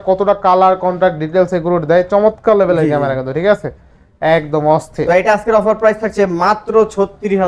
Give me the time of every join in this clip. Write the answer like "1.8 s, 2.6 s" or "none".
none